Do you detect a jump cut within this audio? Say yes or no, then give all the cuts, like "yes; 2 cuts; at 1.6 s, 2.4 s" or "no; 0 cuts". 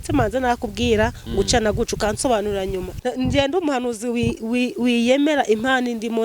yes; 1 cut; at 2.8 s